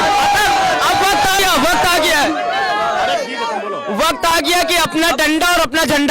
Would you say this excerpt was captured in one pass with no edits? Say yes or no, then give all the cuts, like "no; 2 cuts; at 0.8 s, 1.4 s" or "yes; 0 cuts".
no; 1 cut; at 1.4 s